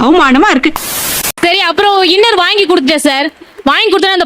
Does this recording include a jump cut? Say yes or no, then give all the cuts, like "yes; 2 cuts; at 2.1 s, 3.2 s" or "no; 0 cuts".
yes; 1 cut; at 1.3 s